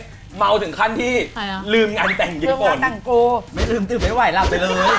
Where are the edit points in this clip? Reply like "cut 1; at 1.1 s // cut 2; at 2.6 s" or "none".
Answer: cut 1; at 1.4 s